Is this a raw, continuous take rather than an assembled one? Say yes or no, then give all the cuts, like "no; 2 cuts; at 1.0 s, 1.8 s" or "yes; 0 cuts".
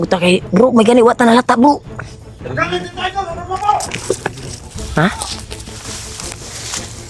yes; 0 cuts